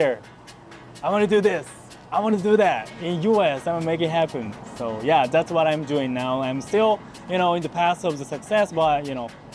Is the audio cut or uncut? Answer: uncut